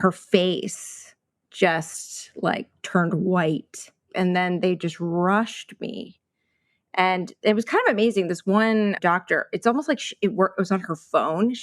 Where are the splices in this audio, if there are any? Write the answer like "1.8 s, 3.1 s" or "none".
4.1 s